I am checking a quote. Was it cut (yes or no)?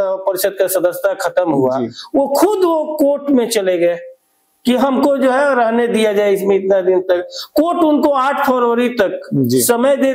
no